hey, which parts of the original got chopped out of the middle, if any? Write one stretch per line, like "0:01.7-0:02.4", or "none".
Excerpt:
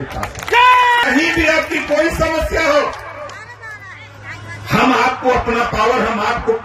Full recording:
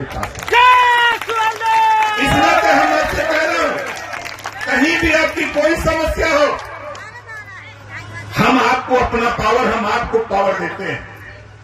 0:01.0-0:04.7